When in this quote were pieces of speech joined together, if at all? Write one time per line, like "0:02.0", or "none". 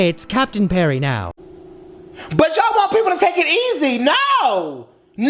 0:01.3